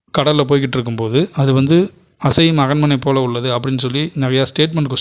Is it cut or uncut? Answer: uncut